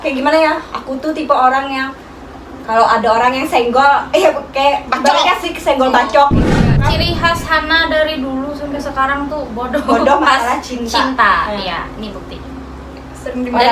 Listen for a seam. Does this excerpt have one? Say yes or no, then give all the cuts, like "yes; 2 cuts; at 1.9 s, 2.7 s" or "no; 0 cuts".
yes; 1 cut; at 6.7 s